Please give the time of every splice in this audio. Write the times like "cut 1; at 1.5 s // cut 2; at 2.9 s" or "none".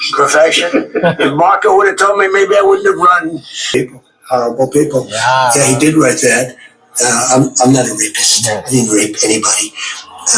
cut 1; at 3.7 s

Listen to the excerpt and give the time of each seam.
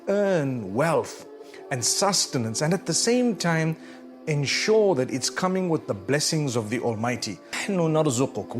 cut 1; at 7.6 s

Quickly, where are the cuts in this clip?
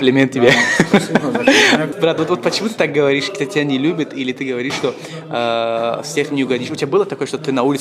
cut 1; at 1.9 s

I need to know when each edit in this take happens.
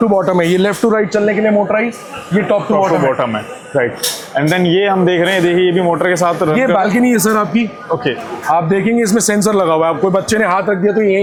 none

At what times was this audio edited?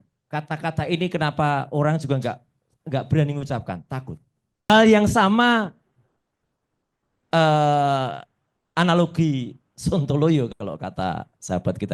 cut 1; at 4.7 s

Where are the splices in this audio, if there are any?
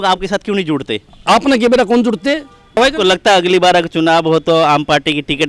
cut 1; at 2.8 s

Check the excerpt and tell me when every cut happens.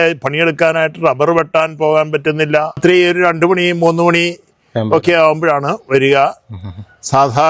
cut 1; at 2.8 s

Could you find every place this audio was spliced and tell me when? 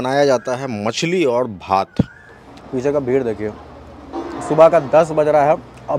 cut 1; at 2.2 s

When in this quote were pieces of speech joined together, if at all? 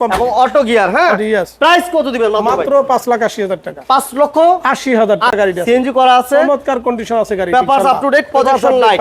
cut 1; at 5.3 s

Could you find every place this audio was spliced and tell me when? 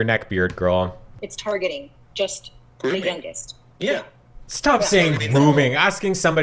cut 1; at 1.3 s

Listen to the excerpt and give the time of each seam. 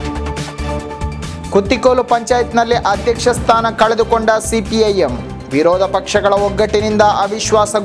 cut 1; at 1.1 s

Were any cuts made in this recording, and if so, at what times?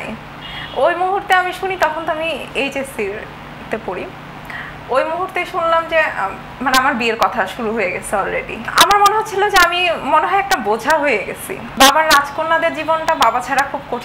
cut 1; at 8.6 s // cut 2; at 11.7 s

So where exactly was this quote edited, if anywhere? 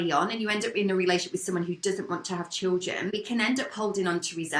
cut 1; at 3.1 s

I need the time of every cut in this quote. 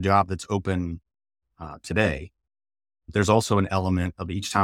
none

